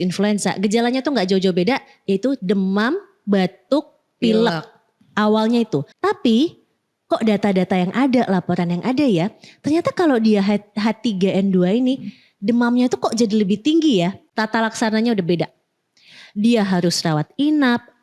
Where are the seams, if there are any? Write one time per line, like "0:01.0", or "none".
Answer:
0:05.9
0:14.2